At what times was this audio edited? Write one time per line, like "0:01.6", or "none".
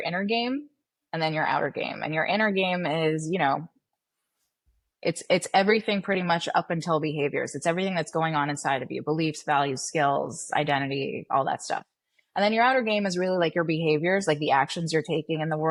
none

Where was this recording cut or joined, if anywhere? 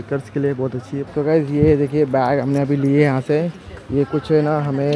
0:01.1

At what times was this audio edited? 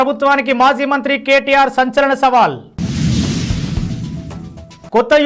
none

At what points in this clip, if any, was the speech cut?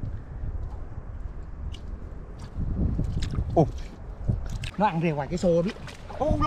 0:04.6

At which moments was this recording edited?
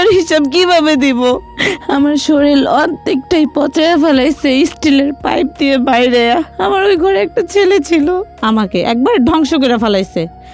0:01.6
0:08.3

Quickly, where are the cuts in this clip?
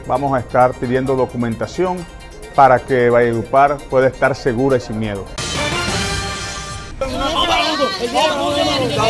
0:05.3
0:07.0

